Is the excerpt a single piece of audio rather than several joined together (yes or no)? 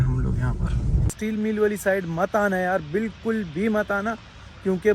no